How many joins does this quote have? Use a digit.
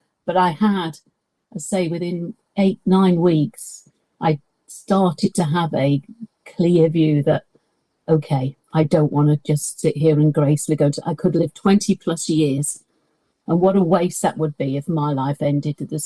0